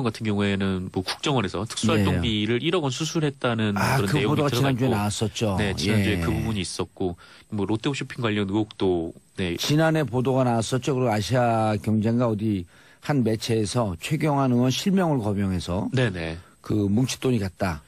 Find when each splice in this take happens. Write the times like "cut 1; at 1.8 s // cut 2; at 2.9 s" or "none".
none